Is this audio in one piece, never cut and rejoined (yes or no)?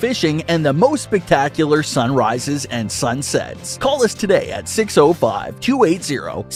yes